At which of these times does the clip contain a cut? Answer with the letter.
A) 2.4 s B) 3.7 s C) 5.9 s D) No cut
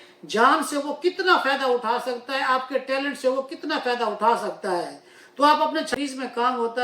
C